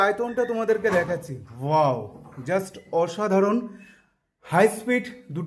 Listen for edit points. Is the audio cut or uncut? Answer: uncut